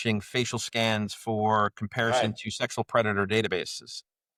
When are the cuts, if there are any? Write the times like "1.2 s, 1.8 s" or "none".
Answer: none